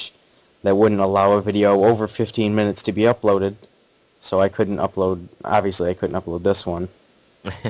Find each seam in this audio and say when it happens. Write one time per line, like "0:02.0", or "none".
0:04.7